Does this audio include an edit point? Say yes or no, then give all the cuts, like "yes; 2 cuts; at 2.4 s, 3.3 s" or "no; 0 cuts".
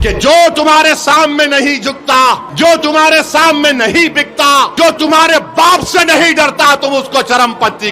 yes; 2 cuts; at 2.5 s, 4.7 s